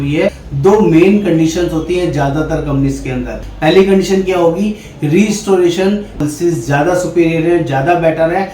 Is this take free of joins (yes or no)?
no